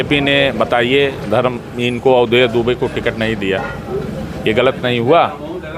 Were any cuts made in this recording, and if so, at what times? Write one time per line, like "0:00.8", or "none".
none